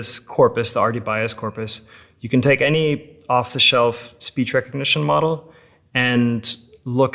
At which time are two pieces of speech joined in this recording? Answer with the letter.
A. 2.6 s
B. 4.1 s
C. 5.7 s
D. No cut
D